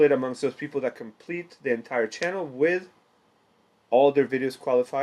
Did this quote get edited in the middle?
no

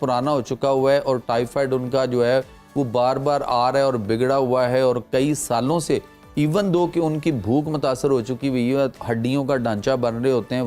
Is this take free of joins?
yes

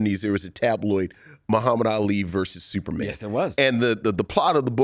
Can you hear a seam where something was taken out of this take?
no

